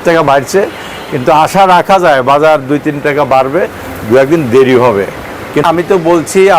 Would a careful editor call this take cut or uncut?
cut